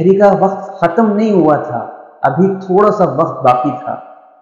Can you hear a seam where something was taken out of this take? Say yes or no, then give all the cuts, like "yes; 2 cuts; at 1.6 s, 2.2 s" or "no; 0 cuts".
no; 0 cuts